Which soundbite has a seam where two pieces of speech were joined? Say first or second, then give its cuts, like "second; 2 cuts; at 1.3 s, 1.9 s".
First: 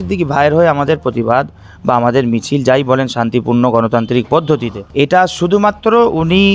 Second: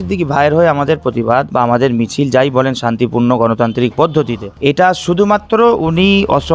second; 1 cut; at 1.5 s